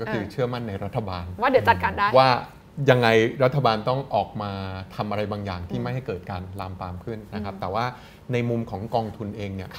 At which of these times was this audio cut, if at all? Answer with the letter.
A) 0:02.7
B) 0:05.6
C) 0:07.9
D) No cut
D